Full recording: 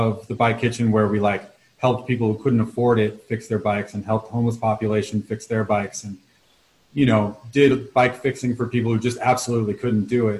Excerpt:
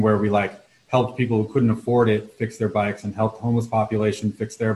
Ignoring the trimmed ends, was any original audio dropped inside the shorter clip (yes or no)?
no